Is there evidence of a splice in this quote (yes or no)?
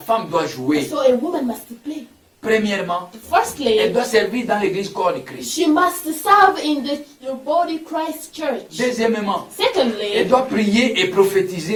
no